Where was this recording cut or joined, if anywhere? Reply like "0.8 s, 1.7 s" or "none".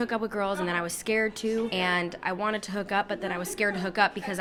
none